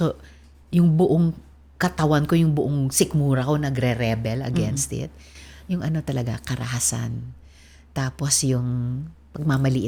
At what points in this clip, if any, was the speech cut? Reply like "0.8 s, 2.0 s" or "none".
none

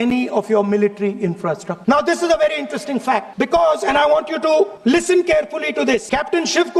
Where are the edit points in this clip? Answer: 1.7 s, 3.3 s, 4.8 s, 6.0 s

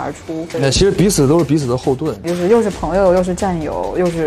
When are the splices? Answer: 2.1 s

